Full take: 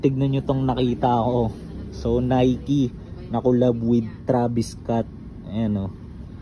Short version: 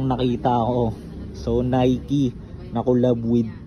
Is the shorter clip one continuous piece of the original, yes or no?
yes